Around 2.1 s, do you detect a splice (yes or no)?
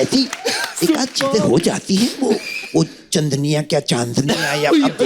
no